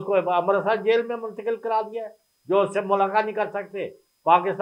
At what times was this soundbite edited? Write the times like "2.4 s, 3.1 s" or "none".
none